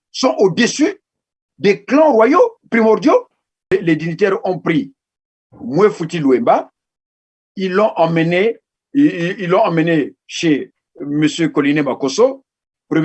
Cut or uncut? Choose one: cut